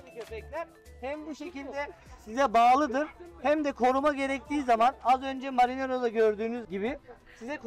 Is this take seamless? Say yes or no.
yes